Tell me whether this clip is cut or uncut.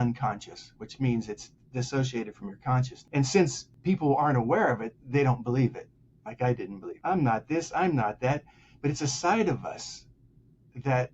cut